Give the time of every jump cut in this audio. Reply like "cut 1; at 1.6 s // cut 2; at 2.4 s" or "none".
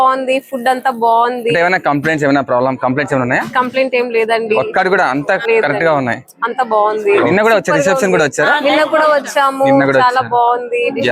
cut 1; at 5.4 s // cut 2; at 7.3 s